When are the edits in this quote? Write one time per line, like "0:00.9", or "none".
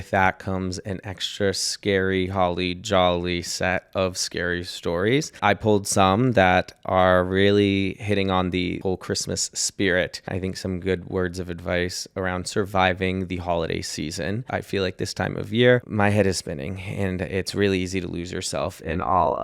0:05.4
0:08.8
0:10.3
0:14.4
0:15.9